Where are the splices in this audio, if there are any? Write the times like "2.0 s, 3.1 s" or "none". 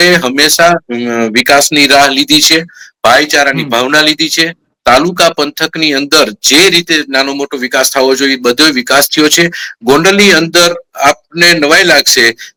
none